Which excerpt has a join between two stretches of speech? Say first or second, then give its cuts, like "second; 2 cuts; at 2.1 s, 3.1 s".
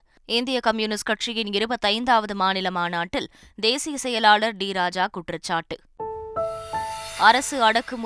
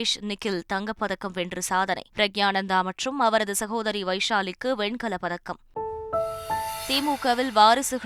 second; 1 cut; at 2.1 s